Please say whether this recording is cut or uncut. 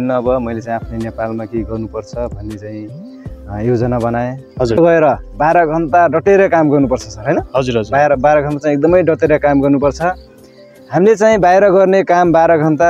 cut